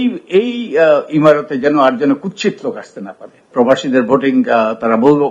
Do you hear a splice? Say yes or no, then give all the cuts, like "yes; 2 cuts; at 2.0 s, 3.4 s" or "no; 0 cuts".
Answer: yes; 1 cut; at 3.5 s